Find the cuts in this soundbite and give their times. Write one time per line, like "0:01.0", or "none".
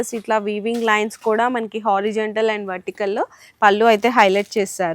none

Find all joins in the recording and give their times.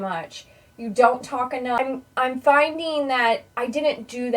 0:01.8

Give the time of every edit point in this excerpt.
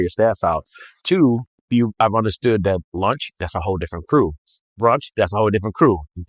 0:01.6

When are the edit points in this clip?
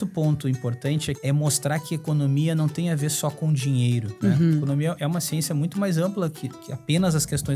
0:01.2
0:04.1

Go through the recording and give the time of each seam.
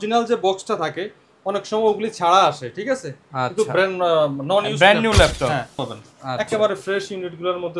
0:05.8

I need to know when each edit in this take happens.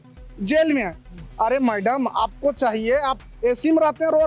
none

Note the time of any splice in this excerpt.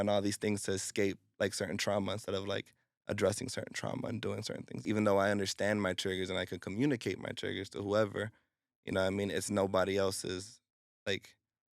0:04.8

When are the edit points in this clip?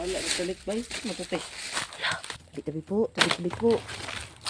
0:02.4

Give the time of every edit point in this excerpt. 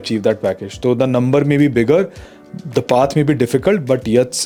none

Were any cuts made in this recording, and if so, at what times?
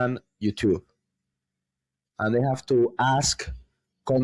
none

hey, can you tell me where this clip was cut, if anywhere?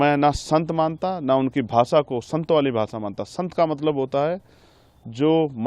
none

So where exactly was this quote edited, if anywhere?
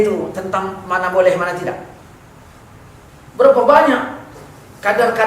0:03.1

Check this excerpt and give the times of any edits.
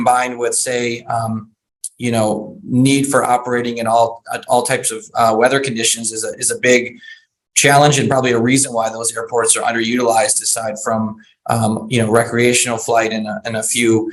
none

